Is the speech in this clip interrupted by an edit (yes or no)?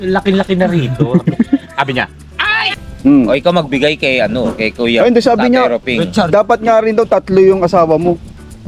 yes